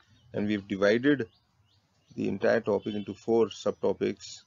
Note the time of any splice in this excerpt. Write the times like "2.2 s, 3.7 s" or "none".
none